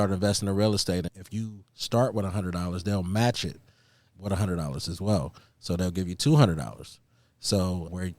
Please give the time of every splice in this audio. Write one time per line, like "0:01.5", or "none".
0:01.2
0:04.2